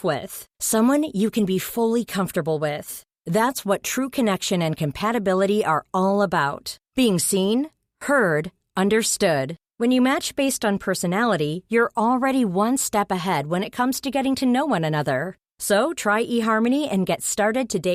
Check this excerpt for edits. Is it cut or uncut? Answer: uncut